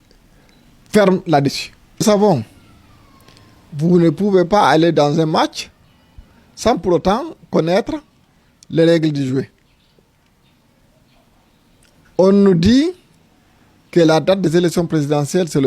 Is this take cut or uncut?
cut